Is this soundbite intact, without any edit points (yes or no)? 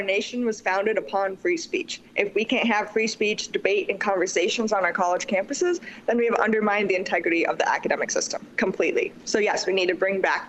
yes